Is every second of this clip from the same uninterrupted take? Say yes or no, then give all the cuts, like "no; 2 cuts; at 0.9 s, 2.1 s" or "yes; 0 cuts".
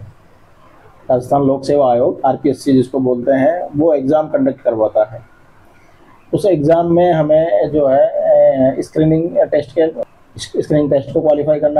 yes; 0 cuts